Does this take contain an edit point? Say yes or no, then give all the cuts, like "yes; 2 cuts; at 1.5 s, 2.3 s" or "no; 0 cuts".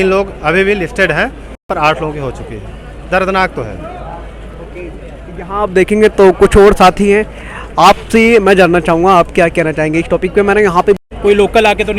no; 0 cuts